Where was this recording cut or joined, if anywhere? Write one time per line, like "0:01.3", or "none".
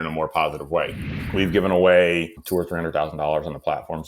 0:01.1
0:02.4